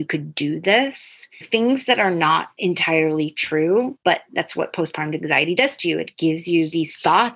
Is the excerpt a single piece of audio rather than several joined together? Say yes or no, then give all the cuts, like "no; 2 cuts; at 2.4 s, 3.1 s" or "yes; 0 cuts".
no; 3 cuts; at 1.5 s, 2.5 s, 4.2 s